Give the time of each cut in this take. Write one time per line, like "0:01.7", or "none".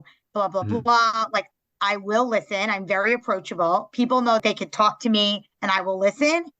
0:04.4